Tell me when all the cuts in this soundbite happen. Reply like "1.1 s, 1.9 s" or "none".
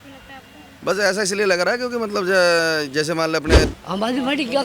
3.6 s